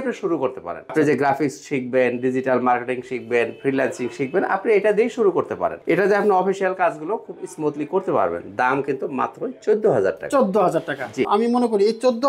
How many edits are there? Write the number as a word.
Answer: three